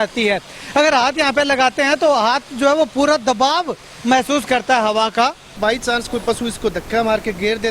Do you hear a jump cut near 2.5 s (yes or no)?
no